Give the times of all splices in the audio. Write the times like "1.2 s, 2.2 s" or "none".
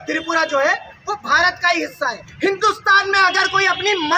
2.2 s

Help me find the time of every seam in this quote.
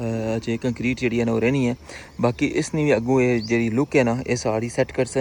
none

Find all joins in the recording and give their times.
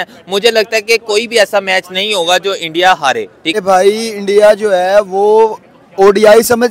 3.6 s

